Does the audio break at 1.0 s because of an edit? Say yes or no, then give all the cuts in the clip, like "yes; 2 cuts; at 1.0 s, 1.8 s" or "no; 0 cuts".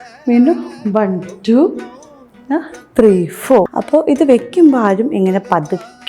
no; 1 cut; at 3.8 s